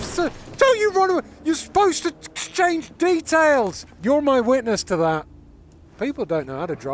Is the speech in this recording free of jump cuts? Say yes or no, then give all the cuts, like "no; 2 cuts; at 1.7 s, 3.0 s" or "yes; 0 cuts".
no; 2 cuts; at 3.9 s, 5.9 s